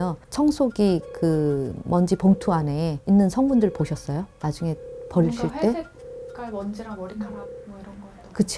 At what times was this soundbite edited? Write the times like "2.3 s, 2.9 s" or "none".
2.9 s